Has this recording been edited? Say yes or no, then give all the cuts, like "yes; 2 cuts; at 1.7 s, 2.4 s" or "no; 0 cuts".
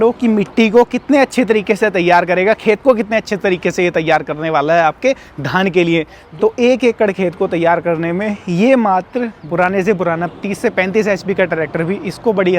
yes; 2 cuts; at 6.2 s, 9.4 s